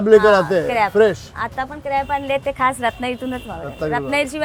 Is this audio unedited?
yes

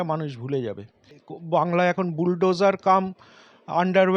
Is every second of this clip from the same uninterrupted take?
no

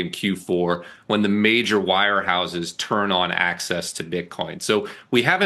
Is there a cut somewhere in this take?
no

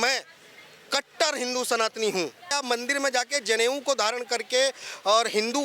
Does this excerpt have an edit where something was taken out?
yes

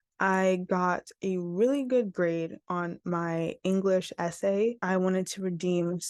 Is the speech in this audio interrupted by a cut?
yes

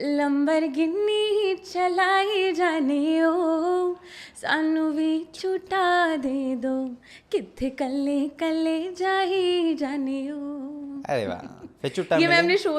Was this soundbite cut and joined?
no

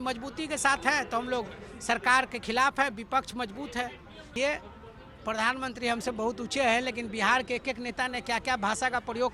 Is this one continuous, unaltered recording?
no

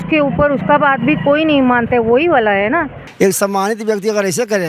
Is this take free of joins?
no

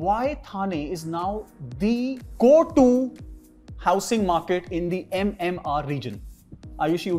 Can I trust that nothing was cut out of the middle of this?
yes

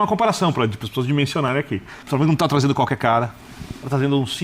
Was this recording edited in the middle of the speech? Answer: yes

